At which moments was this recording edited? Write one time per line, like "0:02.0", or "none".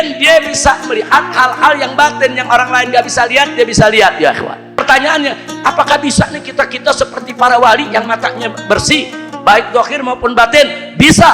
0:04.8

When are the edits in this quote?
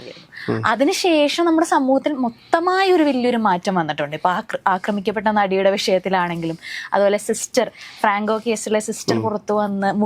none

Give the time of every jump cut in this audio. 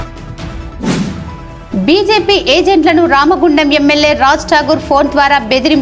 0:01.1

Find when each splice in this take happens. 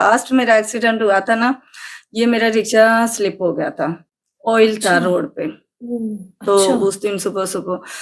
none

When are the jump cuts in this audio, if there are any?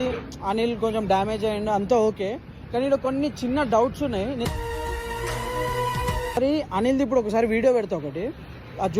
0:06.4

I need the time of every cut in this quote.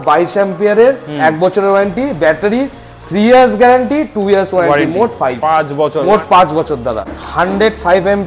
0:07.0

